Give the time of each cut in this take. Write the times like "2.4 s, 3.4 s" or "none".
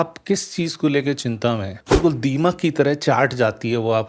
1.8 s